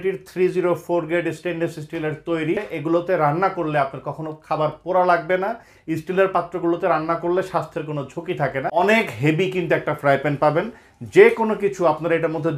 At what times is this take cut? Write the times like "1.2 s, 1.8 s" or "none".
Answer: 2.6 s, 5.7 s, 8.7 s